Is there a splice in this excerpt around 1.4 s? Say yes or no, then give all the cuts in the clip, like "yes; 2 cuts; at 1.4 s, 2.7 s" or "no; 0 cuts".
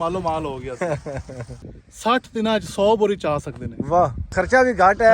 yes; 2 cuts; at 1.4 s, 4.2 s